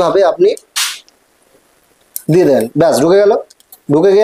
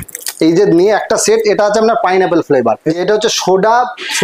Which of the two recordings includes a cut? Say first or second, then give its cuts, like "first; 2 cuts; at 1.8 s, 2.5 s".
second; 1 cut; at 3.0 s